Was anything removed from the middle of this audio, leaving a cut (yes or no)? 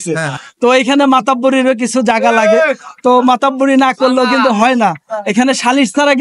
no